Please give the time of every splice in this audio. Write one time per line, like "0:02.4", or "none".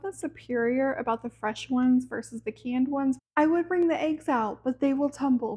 0:03.2